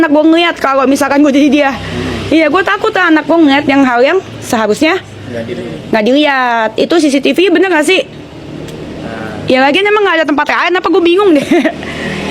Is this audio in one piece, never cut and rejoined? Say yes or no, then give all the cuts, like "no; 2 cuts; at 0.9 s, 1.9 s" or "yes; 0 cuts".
yes; 0 cuts